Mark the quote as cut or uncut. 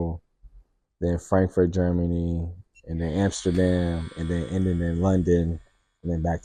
uncut